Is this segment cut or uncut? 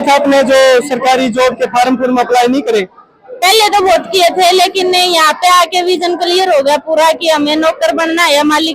uncut